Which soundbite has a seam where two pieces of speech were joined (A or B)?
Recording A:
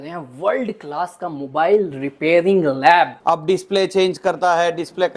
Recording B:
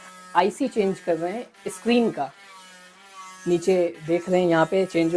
A